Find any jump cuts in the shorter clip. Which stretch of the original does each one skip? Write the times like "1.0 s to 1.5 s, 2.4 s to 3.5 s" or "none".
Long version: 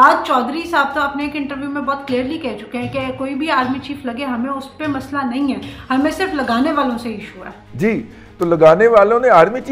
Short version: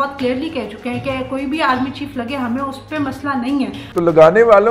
5.7 s to 8.3 s